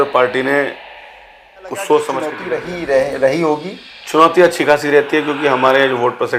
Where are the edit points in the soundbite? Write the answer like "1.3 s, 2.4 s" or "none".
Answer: 2.5 s